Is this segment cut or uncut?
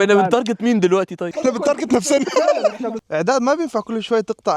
cut